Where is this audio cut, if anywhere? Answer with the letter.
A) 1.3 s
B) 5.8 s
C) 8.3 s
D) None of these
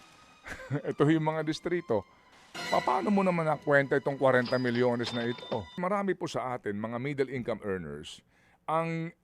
B